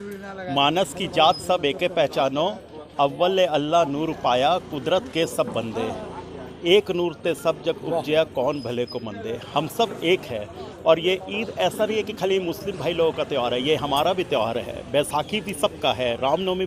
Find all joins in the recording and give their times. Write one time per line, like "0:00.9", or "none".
none